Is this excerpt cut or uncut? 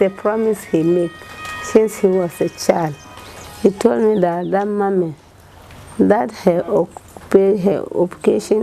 uncut